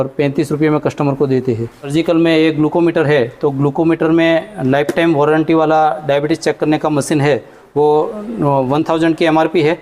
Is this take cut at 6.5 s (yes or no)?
no